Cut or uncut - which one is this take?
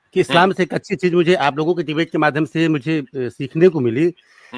uncut